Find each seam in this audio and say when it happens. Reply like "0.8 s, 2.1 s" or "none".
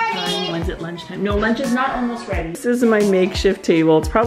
2.6 s